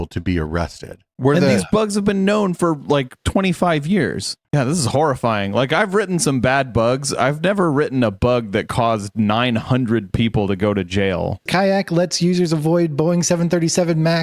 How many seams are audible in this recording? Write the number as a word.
three